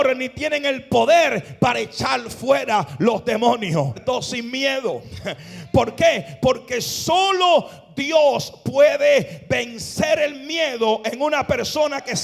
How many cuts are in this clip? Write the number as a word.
one